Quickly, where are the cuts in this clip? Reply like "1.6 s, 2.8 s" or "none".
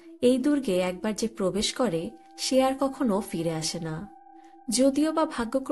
none